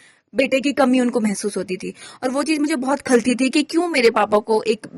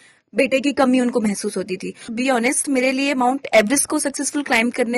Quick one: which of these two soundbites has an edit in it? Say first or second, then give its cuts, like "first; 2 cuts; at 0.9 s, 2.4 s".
second; 1 cut; at 2.1 s